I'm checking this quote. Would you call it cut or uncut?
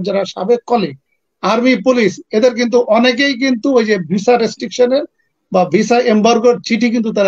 uncut